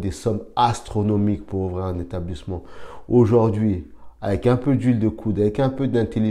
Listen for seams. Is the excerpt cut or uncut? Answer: uncut